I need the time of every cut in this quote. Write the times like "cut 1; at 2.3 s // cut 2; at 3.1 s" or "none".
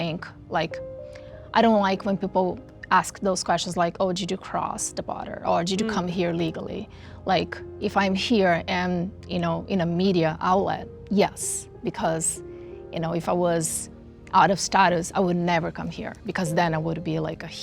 none